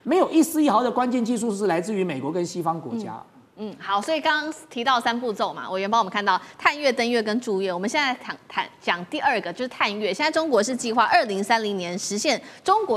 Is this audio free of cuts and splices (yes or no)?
yes